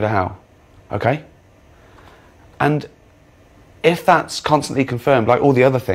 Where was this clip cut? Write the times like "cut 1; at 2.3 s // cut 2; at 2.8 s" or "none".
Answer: cut 1; at 1.3 s